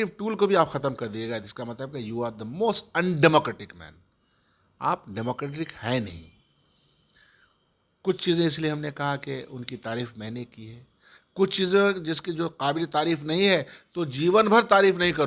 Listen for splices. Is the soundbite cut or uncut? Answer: uncut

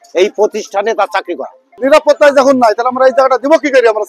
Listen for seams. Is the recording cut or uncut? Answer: cut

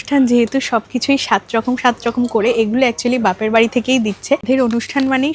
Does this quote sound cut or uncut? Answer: cut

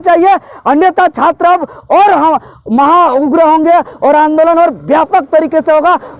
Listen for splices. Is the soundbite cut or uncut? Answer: uncut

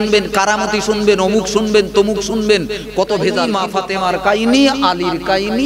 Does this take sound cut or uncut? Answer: cut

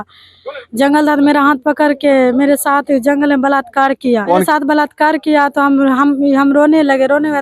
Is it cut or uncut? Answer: cut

